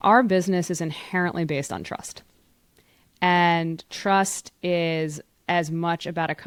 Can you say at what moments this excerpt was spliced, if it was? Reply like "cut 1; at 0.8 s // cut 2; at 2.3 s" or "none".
none

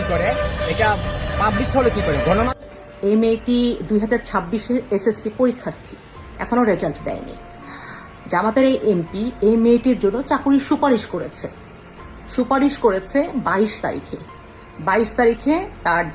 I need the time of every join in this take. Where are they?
cut 1; at 2.5 s

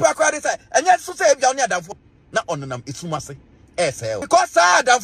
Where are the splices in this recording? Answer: cut 1; at 1.9 s // cut 2; at 4.2 s

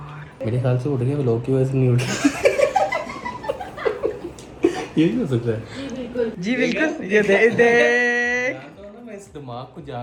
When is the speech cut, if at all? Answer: none

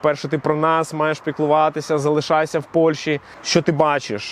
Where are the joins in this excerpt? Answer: cut 1; at 3.3 s

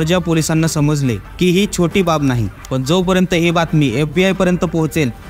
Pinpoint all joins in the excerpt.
cut 1; at 2.5 s

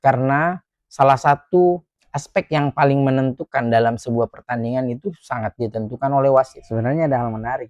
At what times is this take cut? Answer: cut 1; at 6.6 s

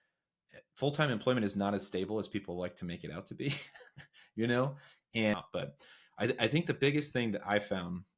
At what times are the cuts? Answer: cut 1; at 5.3 s

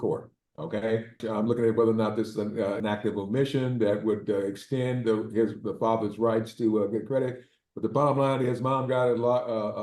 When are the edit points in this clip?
cut 1; at 1.2 s

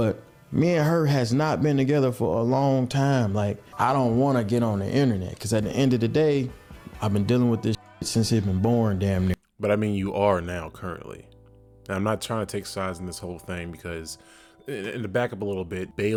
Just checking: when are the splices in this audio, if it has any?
none

